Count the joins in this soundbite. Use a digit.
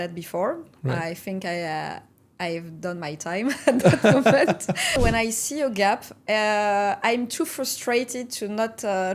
1